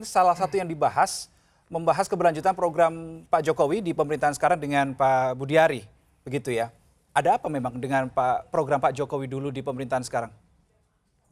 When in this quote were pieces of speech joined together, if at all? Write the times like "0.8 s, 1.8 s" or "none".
none